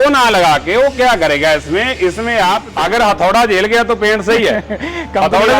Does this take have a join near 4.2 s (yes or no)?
no